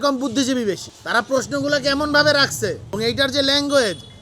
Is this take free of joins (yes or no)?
no